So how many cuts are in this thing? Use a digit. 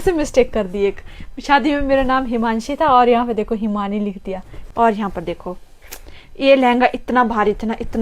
1